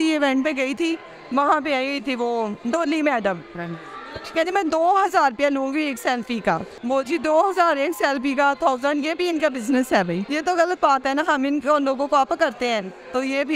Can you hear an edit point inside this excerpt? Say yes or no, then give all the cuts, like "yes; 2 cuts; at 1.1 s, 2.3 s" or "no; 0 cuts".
yes; 2 cuts; at 6.7 s, 10.2 s